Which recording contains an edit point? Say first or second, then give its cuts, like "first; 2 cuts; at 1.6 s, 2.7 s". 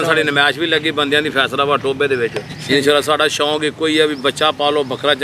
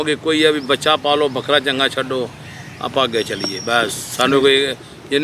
first; 1 cut; at 2.5 s